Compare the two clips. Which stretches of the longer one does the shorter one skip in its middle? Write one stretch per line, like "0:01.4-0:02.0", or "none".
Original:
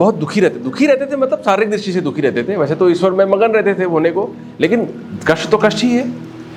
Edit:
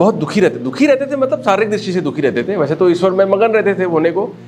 none